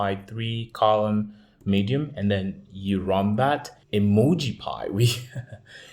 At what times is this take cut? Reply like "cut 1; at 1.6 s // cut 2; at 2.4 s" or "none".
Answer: cut 1; at 3.8 s